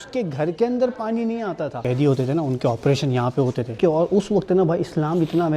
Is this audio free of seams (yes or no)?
no